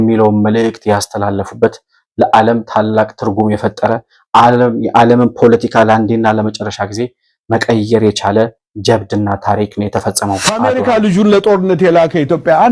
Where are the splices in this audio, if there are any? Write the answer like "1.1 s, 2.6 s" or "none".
10.5 s